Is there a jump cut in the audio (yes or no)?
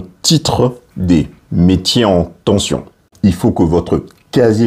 no